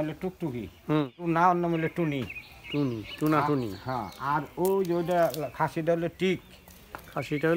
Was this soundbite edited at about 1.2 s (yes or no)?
yes